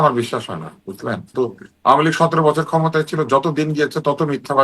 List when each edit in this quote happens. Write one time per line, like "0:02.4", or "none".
0:01.3